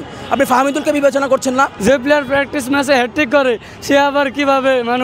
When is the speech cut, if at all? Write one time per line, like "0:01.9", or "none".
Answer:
0:01.7